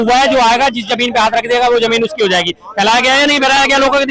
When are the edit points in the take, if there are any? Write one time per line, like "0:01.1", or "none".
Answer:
none